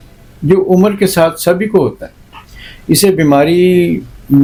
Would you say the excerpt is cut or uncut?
uncut